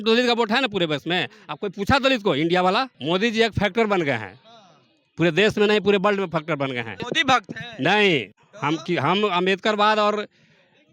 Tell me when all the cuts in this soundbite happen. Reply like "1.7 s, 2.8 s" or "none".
2.9 s, 7.1 s

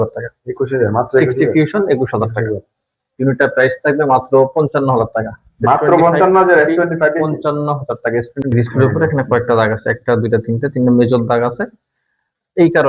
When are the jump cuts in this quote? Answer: 3.0 s, 8.5 s

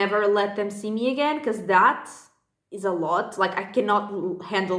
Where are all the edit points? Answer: none

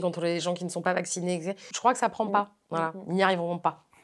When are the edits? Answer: 1.7 s, 2.6 s

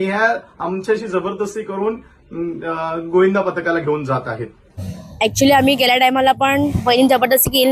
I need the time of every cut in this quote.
5.1 s

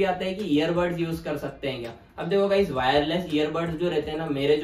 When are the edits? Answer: none

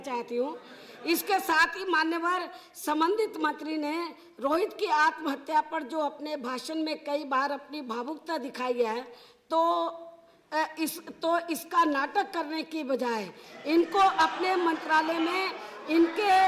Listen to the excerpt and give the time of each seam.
none

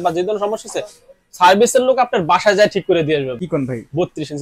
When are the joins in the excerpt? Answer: 3.4 s

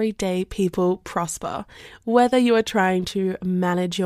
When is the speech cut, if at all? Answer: none

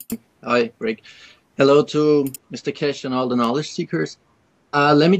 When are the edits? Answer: 3.0 s

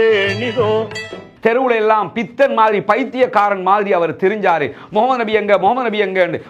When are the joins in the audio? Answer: 1.1 s

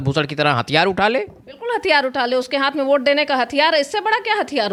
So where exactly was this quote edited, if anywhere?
none

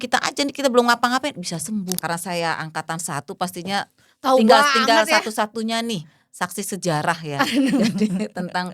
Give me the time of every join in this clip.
1.9 s

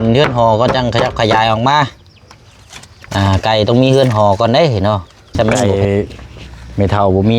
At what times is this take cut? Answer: 5.6 s

